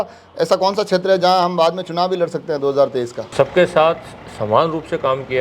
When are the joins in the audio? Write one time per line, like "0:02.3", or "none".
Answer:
0:03.2